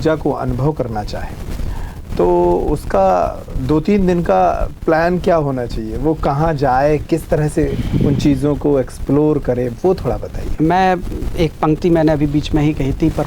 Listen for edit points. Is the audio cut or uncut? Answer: uncut